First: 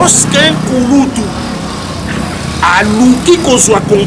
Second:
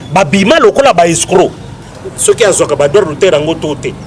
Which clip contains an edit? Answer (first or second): second